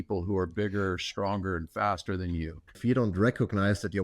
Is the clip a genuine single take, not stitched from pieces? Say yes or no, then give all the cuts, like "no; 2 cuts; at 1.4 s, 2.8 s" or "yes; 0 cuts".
no; 1 cut; at 2.8 s